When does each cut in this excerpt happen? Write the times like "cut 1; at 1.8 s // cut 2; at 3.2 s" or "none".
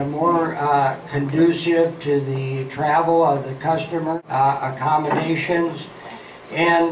cut 1; at 4.2 s